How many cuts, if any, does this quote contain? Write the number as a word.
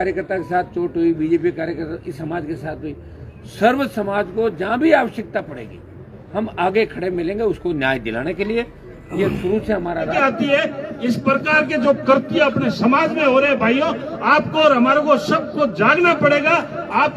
one